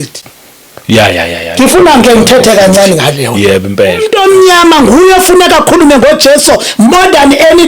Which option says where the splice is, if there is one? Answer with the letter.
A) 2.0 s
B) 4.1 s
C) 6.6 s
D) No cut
B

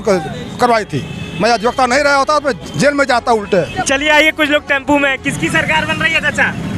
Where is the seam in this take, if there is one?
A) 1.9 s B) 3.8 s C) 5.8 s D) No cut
B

